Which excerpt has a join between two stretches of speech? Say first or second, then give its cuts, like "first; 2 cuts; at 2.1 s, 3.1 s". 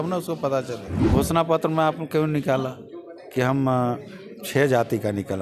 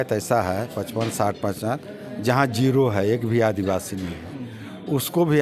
first; 1 cut; at 1.0 s